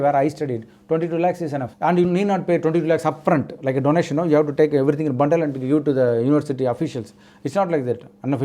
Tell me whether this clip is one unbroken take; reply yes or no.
yes